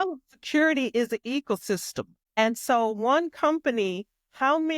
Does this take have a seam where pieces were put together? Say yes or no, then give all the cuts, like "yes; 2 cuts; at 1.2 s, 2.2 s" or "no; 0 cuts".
yes; 1 cut; at 2.2 s